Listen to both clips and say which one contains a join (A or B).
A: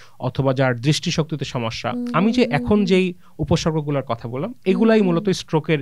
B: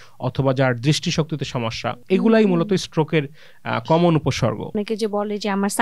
B